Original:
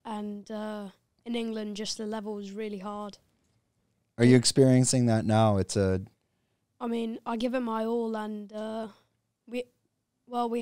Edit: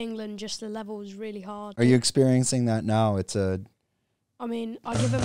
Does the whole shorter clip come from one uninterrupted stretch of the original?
no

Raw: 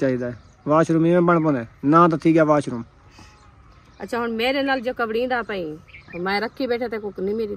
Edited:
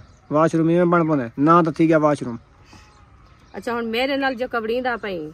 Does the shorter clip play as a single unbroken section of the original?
no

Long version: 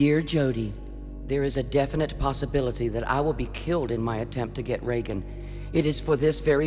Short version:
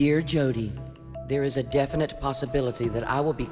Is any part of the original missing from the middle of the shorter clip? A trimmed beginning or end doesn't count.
no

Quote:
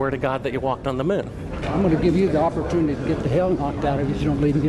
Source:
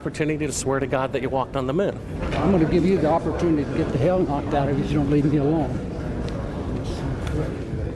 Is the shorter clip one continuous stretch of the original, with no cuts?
yes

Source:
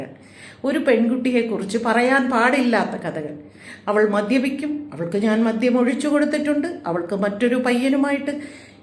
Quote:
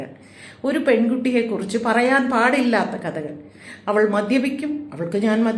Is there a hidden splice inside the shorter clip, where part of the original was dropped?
no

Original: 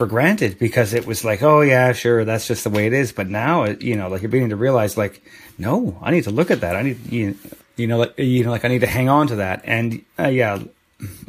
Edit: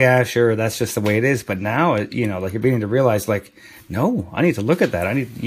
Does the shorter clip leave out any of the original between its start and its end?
no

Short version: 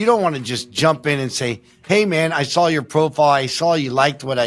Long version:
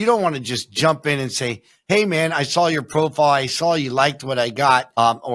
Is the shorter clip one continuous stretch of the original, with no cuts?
yes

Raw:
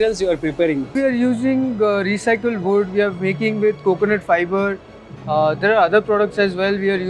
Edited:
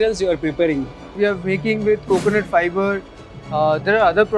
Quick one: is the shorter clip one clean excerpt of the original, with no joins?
no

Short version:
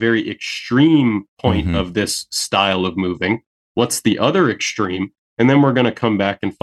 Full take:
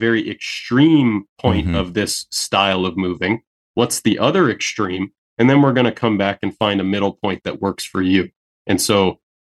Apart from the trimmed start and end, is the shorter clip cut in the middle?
no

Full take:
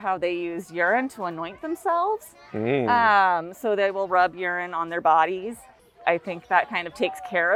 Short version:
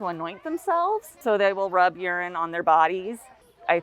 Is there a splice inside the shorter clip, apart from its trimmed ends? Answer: yes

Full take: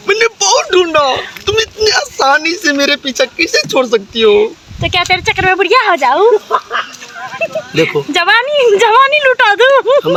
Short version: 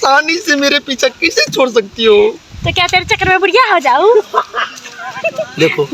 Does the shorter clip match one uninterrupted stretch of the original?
yes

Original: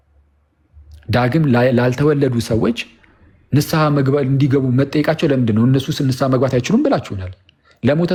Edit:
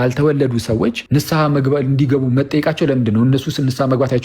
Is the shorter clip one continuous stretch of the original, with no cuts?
no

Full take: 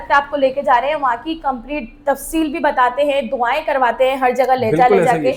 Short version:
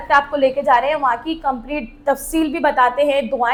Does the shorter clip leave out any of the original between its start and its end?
no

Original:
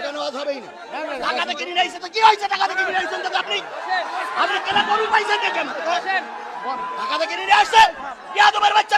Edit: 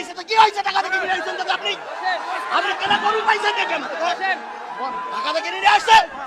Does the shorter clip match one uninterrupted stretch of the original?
yes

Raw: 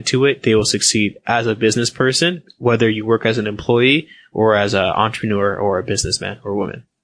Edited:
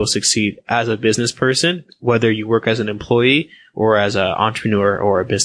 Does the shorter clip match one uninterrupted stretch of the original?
yes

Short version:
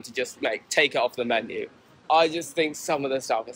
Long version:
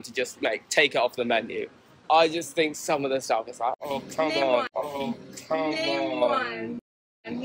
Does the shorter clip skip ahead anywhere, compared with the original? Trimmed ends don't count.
no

